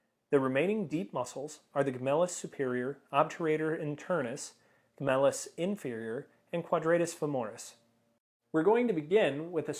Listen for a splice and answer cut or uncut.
uncut